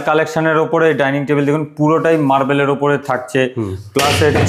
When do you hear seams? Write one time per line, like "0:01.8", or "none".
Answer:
none